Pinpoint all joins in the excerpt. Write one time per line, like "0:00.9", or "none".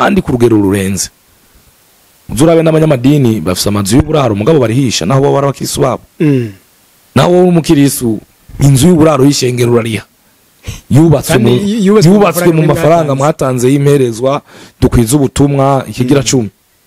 none